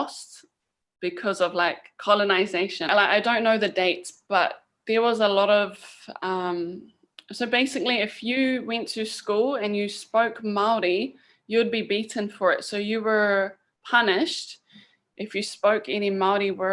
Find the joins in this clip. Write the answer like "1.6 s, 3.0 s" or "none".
2.9 s

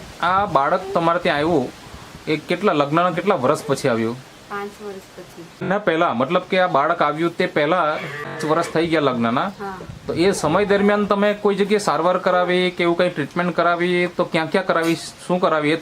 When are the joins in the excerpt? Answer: 5.6 s, 8.4 s

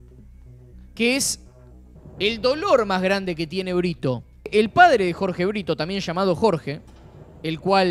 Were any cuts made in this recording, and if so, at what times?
4.5 s

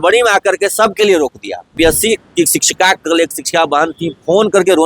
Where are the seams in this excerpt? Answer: 1.7 s

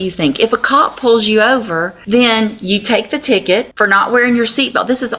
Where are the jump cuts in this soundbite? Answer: 1.9 s, 3.7 s

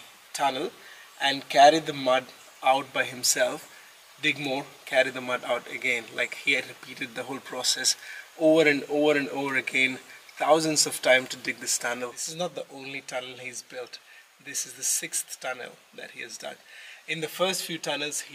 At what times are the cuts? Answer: 12.2 s

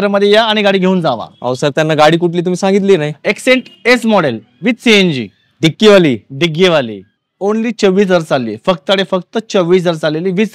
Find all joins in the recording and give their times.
7.2 s

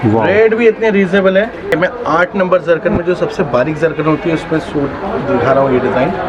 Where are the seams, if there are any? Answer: 1.7 s

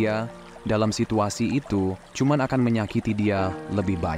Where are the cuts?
2.0 s

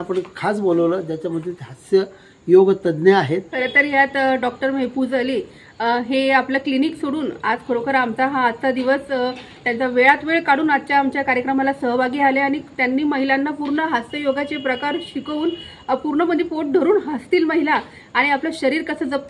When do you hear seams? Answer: 3.5 s

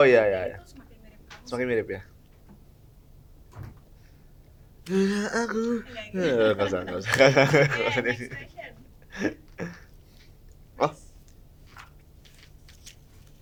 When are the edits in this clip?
none

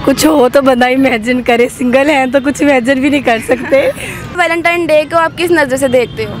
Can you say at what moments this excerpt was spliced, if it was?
4.4 s

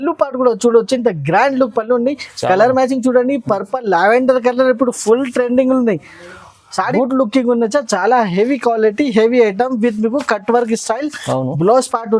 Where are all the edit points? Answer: 6.9 s

